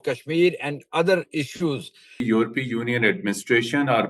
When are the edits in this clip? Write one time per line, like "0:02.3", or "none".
0:02.2